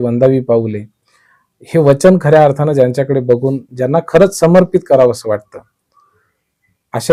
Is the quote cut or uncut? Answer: uncut